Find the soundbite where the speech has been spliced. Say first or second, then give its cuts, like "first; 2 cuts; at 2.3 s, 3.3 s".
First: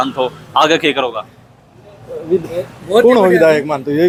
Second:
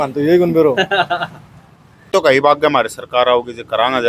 second; 1 cut; at 2.1 s